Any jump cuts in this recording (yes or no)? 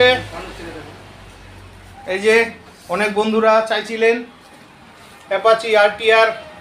no